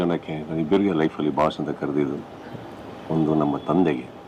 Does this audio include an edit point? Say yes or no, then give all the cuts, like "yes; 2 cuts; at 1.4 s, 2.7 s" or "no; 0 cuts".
no; 0 cuts